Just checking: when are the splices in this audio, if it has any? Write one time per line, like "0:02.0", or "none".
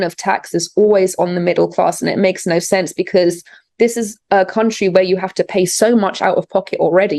none